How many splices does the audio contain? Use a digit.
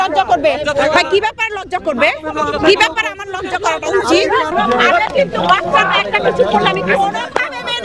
1